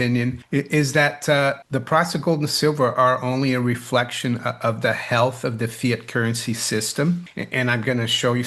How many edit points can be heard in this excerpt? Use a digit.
0